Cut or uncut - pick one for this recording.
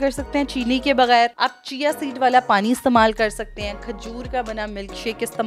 uncut